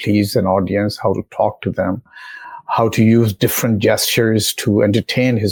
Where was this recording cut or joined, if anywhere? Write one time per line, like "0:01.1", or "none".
none